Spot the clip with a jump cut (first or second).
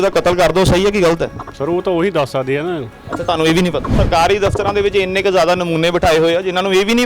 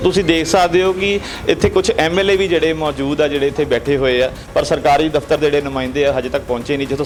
first